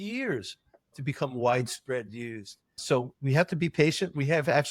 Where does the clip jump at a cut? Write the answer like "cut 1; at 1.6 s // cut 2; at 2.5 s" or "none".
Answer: cut 1; at 0.9 s // cut 2; at 2.8 s

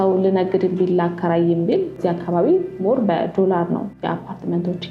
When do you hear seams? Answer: cut 1; at 2.0 s // cut 2; at 3.9 s

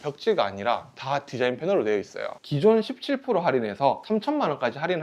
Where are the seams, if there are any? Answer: cut 1; at 2.4 s // cut 2; at 4.0 s

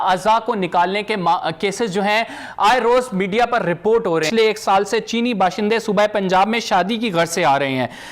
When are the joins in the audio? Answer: cut 1; at 4.3 s

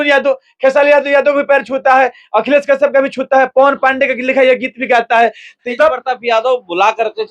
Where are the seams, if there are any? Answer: cut 1; at 5.6 s

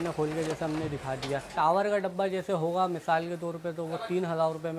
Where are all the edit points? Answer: cut 1; at 1.5 s

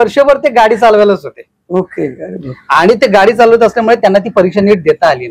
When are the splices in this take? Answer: none

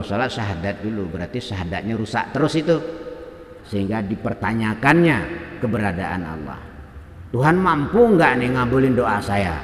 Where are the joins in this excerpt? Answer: cut 1; at 3.5 s

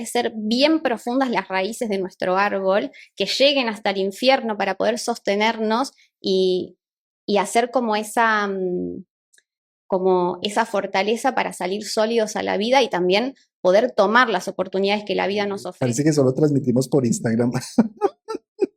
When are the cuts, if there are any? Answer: cut 1; at 15.6 s

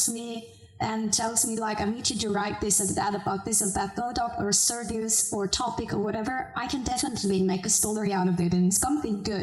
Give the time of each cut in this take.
none

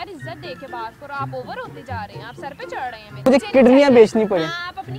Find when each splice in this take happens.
cut 1; at 3.3 s

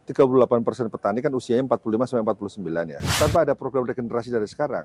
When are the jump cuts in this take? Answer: cut 1; at 3.0 s

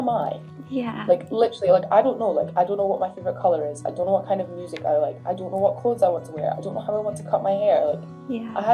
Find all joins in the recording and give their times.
none

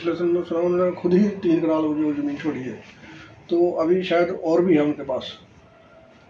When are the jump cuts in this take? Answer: none

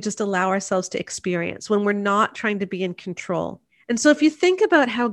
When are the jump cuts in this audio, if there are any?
cut 1; at 3.6 s

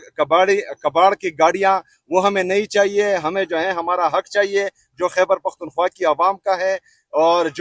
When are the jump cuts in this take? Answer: none

